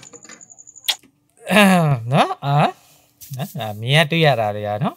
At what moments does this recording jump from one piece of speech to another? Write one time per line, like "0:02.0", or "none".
0:01.2